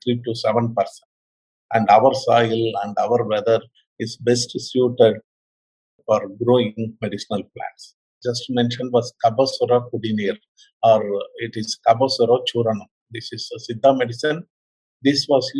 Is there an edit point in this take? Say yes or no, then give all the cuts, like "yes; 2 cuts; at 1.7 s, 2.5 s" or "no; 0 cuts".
yes; 1 cut; at 8.1 s